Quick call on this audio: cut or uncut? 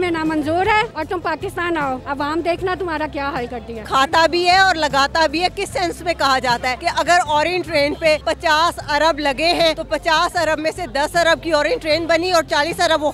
cut